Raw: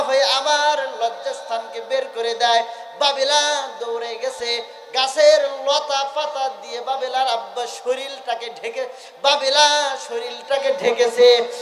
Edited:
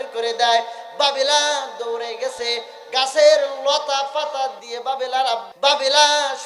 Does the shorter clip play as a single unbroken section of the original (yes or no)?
no